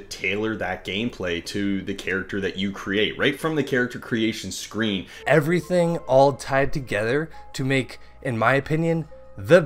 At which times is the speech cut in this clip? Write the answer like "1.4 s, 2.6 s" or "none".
5.1 s